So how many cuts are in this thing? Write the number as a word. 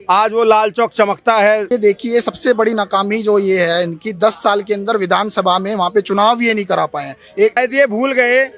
two